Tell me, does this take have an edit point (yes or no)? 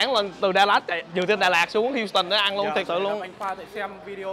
no